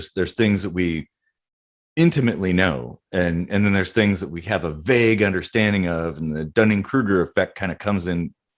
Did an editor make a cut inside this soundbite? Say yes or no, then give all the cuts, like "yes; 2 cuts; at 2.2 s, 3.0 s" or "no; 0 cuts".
no; 0 cuts